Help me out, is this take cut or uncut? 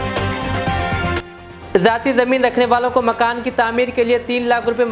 cut